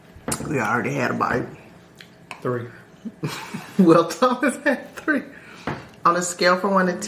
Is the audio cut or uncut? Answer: uncut